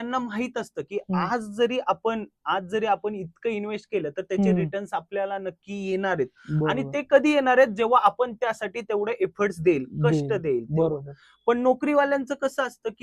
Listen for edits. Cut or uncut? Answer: uncut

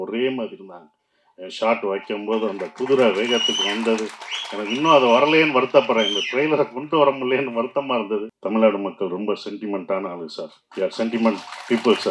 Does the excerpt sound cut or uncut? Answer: cut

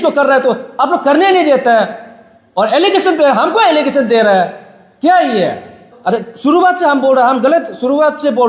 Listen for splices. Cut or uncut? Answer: cut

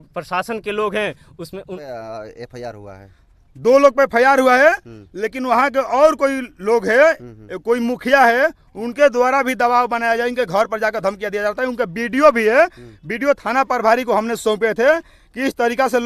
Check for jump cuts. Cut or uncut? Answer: cut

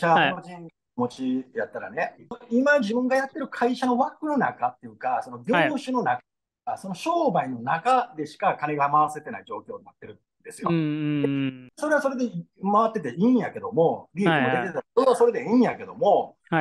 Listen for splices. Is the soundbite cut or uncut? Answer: cut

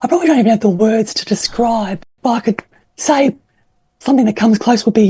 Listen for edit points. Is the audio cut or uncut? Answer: cut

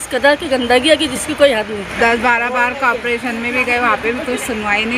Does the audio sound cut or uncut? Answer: cut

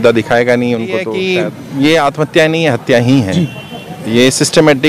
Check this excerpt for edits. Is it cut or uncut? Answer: cut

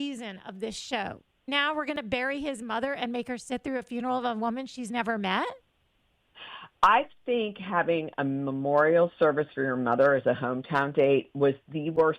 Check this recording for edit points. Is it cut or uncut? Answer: cut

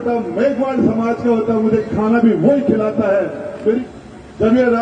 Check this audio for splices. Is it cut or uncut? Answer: cut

